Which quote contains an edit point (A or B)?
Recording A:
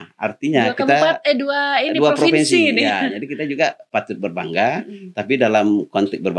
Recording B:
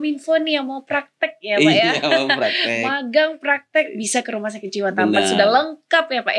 A